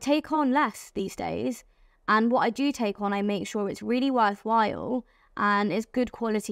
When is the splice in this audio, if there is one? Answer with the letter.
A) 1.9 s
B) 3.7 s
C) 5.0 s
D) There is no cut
D